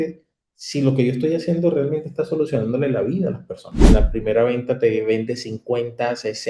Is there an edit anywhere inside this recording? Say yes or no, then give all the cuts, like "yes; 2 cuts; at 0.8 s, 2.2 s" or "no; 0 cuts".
yes; 1 cut; at 3.9 s